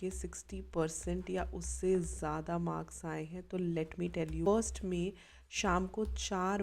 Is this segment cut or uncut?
cut